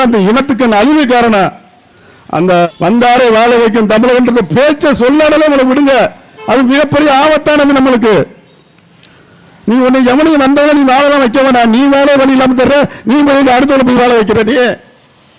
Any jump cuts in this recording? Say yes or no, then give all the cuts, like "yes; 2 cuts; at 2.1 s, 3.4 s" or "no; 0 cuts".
yes; 1 cut; at 2.7 s